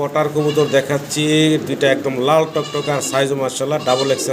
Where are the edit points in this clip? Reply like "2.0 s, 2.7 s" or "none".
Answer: none